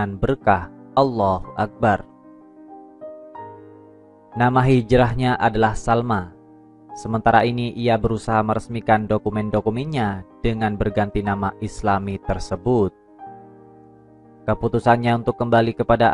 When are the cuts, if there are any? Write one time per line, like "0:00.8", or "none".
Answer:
0:02.2
0:04.3
0:13.0
0:14.4